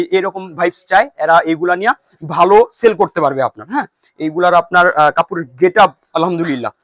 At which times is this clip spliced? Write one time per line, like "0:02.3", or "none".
none